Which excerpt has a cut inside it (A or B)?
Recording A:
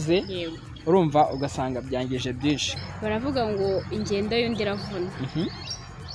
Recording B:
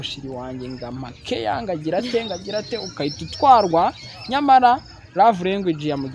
A